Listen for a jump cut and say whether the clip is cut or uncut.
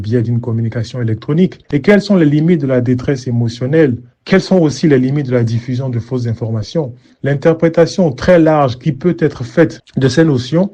cut